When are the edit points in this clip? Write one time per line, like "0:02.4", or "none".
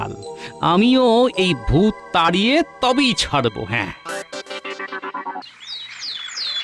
0:05.4